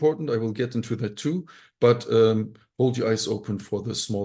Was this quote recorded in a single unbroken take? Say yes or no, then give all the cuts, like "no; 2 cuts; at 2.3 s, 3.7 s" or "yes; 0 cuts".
yes; 0 cuts